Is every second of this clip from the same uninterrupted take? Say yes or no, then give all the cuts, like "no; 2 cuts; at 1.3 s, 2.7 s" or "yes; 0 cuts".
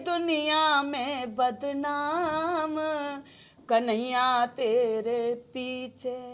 yes; 0 cuts